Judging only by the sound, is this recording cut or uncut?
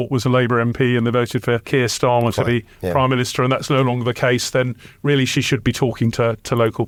uncut